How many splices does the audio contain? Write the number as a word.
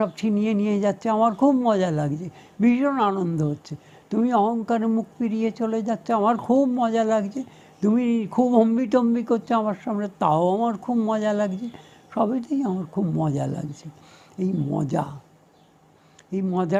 zero